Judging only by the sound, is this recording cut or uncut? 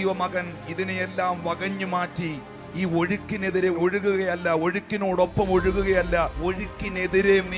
cut